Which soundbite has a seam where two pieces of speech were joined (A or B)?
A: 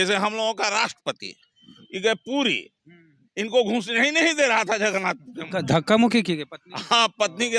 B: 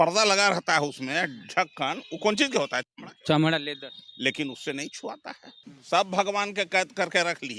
B